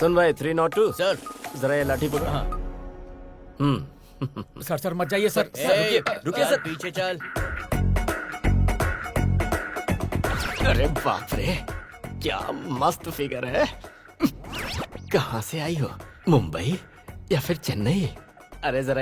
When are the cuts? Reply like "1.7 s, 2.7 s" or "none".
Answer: 7.3 s